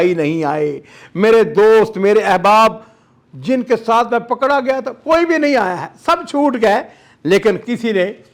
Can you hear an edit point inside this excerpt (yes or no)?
no